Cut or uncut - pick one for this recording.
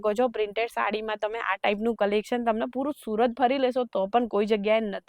uncut